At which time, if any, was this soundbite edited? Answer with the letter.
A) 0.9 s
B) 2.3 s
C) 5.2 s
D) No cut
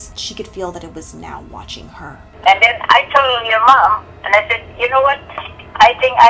B